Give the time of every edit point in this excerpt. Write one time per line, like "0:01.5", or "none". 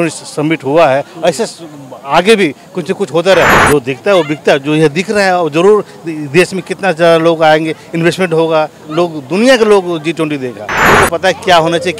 0:03.6
0:10.9

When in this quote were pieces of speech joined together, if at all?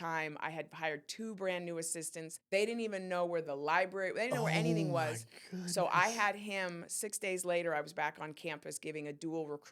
0:02.3

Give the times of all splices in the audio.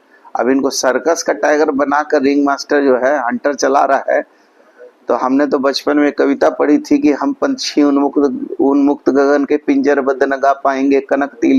none

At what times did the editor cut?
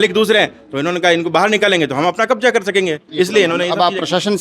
none

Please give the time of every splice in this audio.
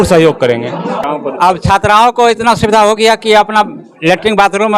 0:01.0

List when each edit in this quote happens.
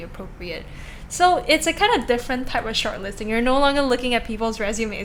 none

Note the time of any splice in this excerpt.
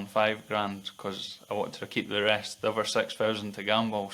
none

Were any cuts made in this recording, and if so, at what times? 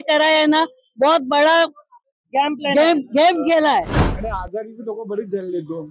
0:03.9

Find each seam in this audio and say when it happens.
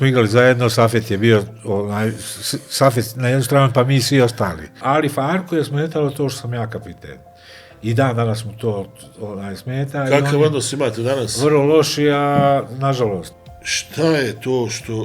0:04.8
0:13.4

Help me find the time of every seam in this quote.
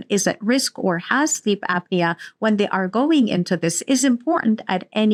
none

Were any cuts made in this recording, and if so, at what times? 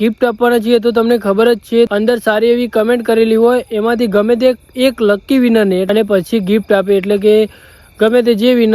0:01.9
0:05.9

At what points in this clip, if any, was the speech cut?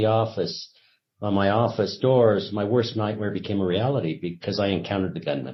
none

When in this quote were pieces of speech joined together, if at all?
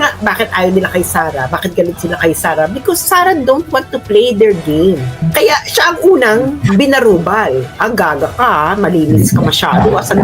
0:05.3

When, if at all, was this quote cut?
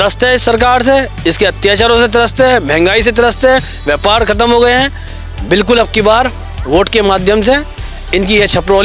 none

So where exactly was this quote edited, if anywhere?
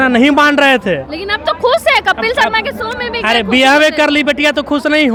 none

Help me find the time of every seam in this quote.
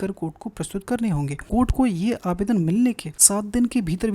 0:01.4
0:03.1

